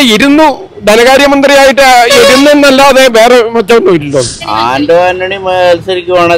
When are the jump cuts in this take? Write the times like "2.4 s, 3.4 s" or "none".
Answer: 4.4 s

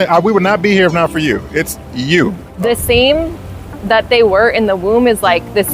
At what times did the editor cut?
2.5 s

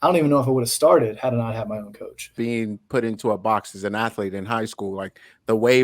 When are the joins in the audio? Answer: 2.3 s

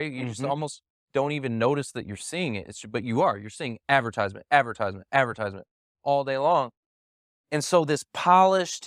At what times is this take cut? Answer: none

